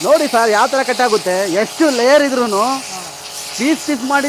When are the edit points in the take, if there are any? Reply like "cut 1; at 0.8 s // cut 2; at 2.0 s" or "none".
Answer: none